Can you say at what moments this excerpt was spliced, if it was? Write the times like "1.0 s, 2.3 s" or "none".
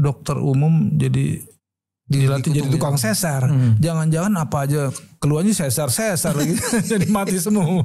none